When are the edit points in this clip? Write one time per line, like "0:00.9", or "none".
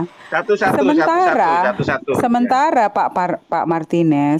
none